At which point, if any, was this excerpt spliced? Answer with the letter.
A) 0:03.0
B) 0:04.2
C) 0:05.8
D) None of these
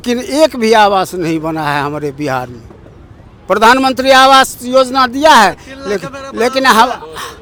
D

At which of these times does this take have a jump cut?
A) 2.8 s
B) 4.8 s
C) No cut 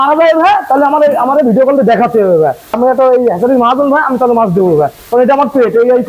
A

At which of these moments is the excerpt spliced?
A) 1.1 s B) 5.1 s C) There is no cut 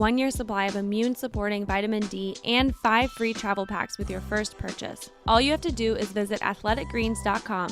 B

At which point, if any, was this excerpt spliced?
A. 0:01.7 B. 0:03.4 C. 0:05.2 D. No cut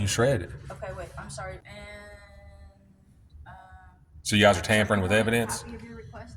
A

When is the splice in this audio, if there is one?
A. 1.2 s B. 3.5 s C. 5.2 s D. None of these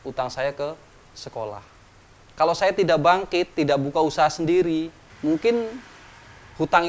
D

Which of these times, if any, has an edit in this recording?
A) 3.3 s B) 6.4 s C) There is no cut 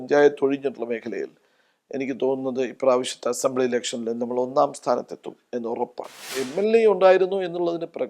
B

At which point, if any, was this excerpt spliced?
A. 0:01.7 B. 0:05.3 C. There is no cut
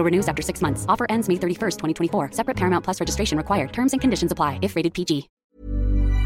B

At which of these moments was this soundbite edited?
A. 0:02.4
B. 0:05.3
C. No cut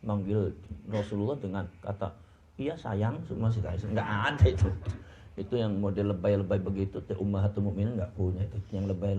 C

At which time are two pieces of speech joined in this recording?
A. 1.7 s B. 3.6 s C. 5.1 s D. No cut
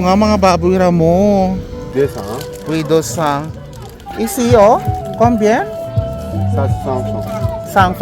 A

